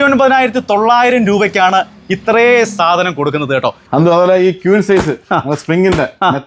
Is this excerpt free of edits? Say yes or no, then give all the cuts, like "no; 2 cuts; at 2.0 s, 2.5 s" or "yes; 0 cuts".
no; 1 cut; at 3.8 s